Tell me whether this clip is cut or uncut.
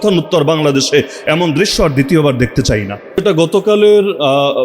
cut